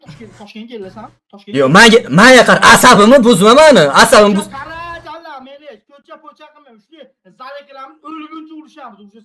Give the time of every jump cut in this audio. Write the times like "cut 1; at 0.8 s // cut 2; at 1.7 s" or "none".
none